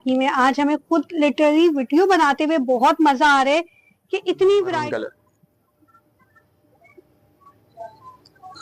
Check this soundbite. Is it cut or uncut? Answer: cut